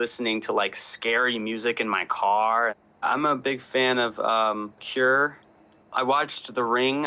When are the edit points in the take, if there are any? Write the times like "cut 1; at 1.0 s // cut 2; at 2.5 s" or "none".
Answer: cut 1; at 3.0 s